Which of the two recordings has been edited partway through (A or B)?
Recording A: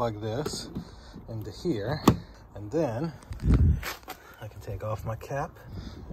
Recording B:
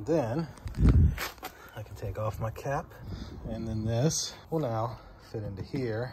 B